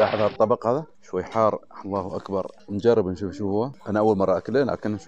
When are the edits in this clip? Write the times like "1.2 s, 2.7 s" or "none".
1.0 s, 2.6 s, 3.8 s